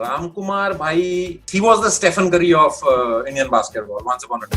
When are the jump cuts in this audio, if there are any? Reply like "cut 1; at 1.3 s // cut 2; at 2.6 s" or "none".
cut 1; at 1.5 s